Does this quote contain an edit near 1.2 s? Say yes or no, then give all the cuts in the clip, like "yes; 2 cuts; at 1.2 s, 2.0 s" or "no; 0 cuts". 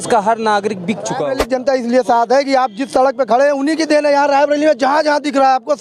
yes; 1 cut; at 1.2 s